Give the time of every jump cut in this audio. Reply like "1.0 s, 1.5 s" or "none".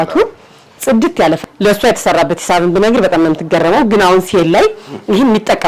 1.4 s